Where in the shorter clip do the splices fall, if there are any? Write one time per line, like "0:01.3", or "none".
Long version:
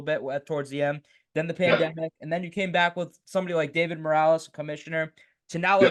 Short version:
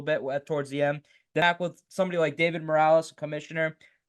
0:01.4